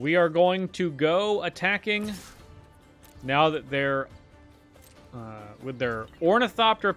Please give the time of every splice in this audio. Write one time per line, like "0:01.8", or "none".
none